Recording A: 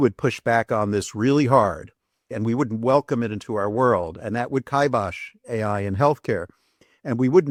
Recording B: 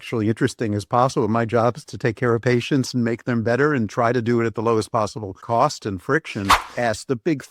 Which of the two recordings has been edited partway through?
B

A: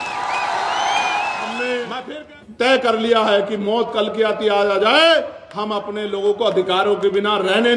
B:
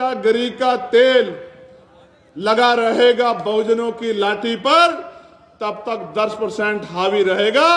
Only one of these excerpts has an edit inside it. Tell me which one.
A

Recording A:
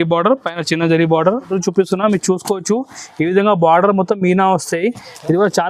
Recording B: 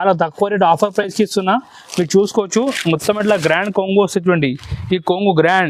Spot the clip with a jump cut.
A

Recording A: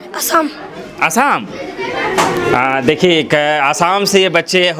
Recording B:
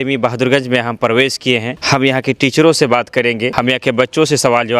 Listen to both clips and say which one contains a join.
B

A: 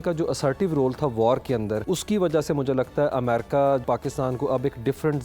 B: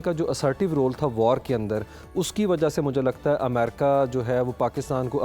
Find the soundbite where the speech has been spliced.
A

